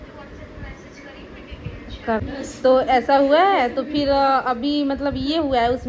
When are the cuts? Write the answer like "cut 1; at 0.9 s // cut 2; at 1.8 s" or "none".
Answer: cut 1; at 2.2 s